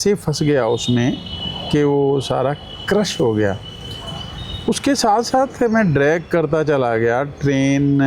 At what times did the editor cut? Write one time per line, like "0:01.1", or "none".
none